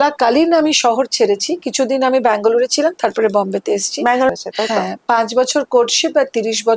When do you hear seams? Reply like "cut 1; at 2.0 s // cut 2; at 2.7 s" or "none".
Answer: cut 1; at 4.3 s